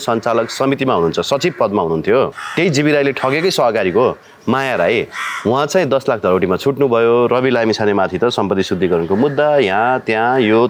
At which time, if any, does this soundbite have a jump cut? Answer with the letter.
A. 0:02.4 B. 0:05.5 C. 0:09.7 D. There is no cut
A